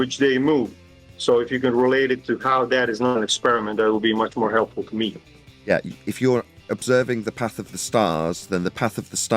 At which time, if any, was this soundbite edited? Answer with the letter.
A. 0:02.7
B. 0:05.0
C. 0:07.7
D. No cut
B